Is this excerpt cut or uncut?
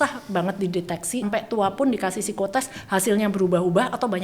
cut